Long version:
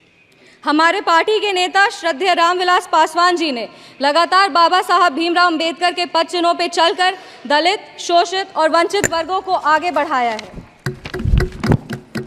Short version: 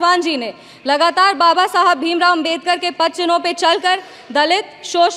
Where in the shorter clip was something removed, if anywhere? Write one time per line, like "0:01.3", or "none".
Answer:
none